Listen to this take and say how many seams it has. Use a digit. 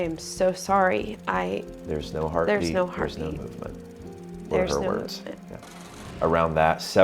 1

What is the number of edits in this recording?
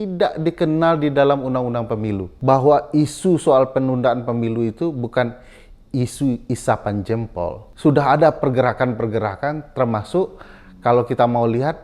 2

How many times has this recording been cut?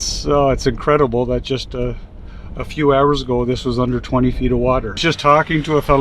1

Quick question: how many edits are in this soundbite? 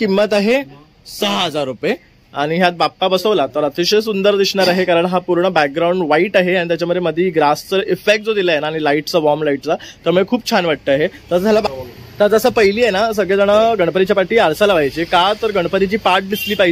1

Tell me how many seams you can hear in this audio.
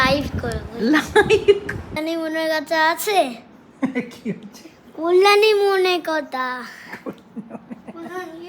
1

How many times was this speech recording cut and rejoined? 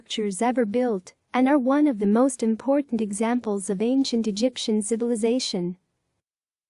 1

